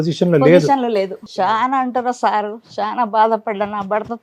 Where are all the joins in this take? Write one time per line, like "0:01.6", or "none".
0:01.2